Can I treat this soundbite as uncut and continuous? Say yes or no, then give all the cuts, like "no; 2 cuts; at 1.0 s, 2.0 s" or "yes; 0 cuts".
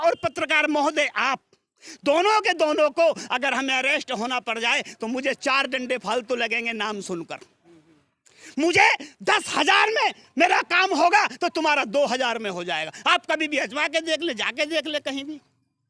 yes; 0 cuts